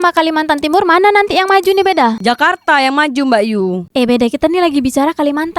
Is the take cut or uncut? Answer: cut